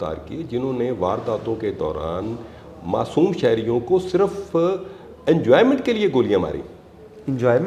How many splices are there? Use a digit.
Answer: 0